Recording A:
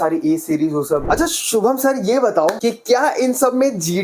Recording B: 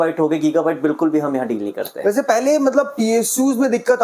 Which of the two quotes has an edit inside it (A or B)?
A